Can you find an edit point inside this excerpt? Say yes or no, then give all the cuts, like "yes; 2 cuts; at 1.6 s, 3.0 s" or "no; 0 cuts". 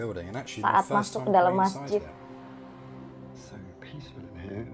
no; 0 cuts